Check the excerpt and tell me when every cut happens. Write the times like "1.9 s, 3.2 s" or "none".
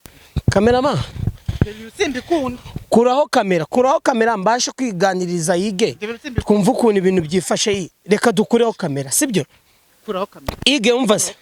none